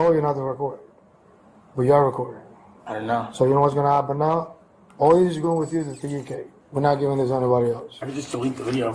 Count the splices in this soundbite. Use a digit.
0